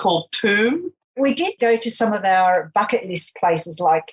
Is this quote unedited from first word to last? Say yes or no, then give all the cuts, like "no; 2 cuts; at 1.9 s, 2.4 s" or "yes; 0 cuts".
no; 1 cut; at 1.5 s